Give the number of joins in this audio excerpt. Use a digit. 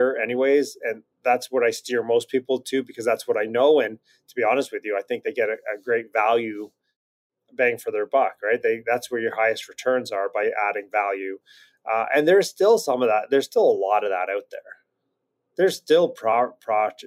0